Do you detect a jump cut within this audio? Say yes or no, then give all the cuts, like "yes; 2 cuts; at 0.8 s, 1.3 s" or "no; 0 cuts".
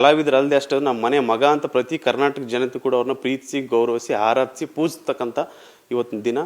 no; 0 cuts